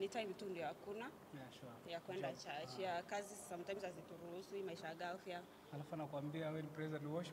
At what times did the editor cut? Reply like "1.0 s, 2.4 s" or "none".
none